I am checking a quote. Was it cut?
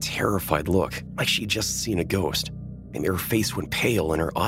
no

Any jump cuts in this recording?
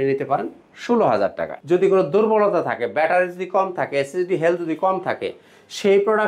yes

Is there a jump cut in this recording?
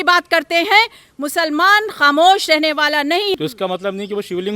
yes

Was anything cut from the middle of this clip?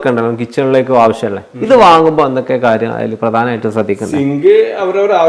no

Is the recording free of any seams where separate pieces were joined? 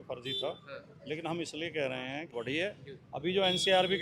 no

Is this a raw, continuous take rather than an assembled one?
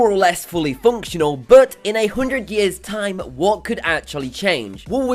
yes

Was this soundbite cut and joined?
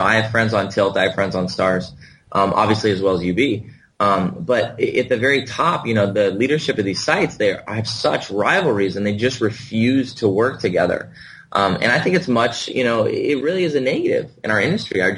no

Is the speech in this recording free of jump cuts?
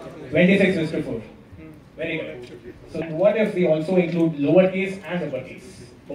no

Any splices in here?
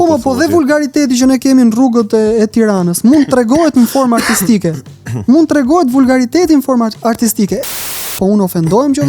yes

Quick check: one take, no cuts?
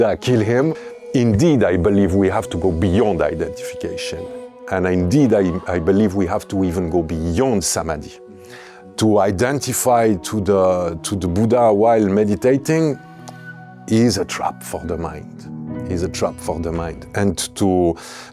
no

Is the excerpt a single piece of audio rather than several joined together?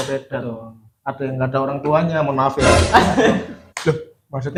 yes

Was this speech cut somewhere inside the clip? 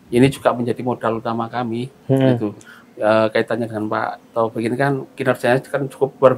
no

